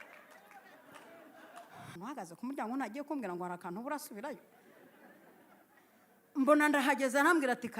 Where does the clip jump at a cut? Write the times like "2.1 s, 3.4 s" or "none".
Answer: 2.0 s